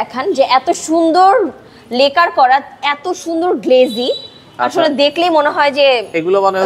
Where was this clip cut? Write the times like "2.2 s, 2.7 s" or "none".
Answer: none